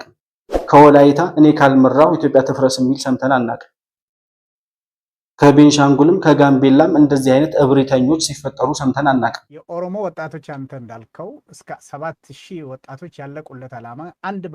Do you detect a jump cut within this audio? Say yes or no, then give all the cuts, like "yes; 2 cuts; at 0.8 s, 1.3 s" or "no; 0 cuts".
yes; 1 cut; at 9.5 s